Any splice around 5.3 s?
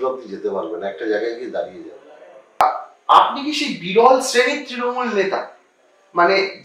no; 1 cut; at 2.6 s

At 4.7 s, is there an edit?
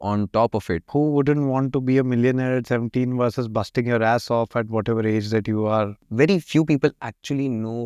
no; 2 cuts; at 0.8 s, 6.1 s

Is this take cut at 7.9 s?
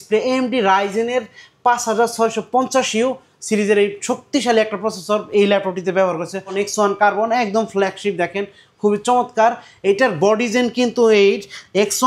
no; 1 cut; at 6.5 s

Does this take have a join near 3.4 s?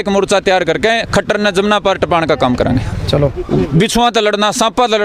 yes; 1 cut; at 3.4 s

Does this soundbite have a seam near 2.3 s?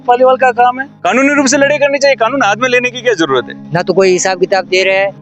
no; 2 cuts; at 0.9 s, 3.6 s

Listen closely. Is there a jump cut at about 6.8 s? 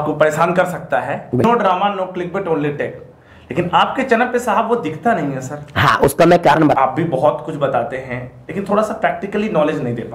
yes; 2 cuts; at 1.4 s, 6.8 s

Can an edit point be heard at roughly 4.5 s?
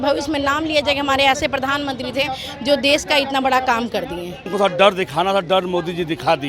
yes; 1 cut; at 4.5 s

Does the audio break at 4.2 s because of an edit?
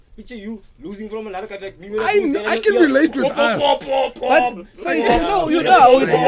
no; 0 cuts

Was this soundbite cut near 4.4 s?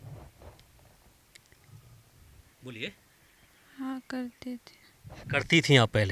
no; 0 cuts

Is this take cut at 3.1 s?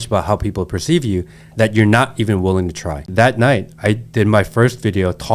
yes; 1 cut; at 3.1 s

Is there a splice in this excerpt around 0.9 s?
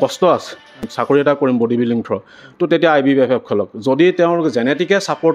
yes; 1 cut; at 0.9 s

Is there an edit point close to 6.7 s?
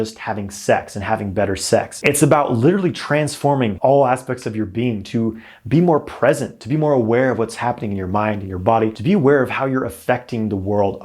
no; 2 cuts; at 3.8 s, 9.0 s

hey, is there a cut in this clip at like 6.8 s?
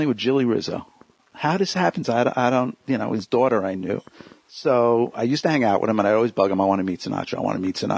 yes; 1 cut; at 6.8 s

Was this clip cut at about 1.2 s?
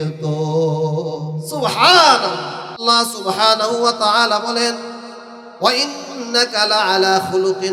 no; 1 cut; at 2.8 s

